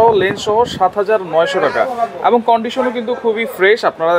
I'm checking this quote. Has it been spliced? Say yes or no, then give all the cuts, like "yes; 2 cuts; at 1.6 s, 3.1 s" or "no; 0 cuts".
no; 0 cuts